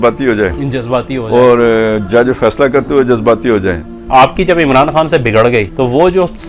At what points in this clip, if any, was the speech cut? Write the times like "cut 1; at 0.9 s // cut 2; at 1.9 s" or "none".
cut 1; at 4.0 s // cut 2; at 5.7 s